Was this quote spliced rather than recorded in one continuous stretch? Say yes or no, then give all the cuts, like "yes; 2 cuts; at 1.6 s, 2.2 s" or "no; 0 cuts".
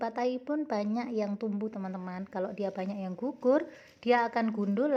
no; 0 cuts